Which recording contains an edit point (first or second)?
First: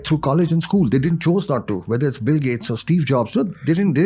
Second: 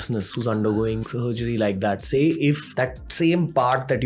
second